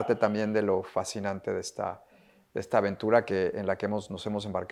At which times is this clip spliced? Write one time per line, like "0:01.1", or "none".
none